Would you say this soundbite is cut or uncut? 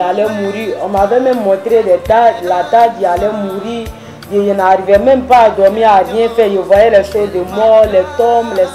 uncut